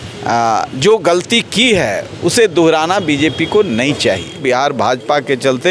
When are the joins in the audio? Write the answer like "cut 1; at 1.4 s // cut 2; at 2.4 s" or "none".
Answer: cut 1; at 4.4 s